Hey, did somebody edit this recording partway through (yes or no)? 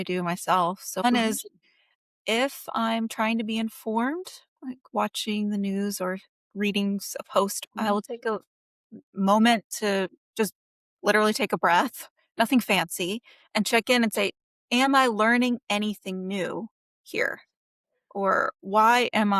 yes